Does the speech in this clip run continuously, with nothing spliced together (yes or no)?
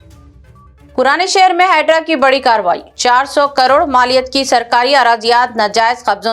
no